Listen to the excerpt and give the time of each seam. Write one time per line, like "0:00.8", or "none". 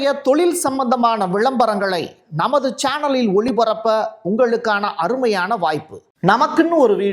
0:06.0